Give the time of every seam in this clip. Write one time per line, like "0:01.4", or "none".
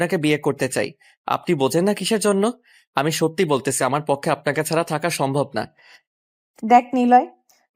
none